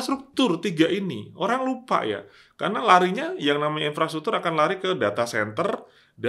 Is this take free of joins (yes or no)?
yes